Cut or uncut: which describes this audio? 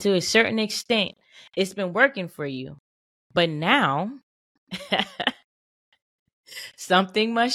uncut